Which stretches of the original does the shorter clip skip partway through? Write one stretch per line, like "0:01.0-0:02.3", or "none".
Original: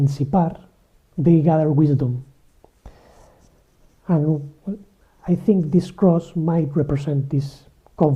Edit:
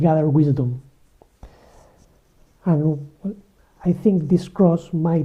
none